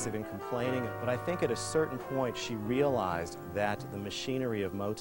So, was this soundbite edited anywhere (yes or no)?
yes